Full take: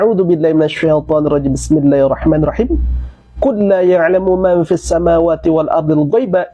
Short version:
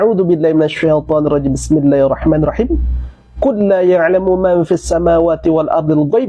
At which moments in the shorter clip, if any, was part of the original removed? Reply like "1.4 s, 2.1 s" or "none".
none